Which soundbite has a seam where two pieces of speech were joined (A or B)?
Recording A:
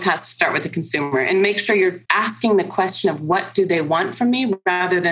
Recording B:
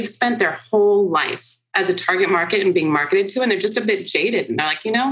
A